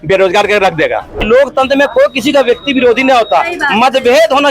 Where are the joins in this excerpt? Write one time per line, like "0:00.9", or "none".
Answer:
0:01.2